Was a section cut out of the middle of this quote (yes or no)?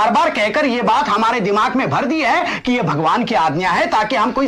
no